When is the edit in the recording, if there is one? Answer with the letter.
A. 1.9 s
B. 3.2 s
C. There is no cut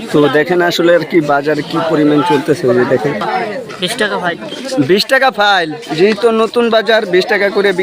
B